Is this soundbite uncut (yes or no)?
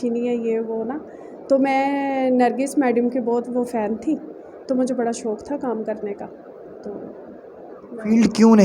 yes